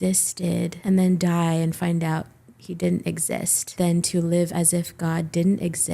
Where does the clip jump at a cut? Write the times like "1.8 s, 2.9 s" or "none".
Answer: 3.6 s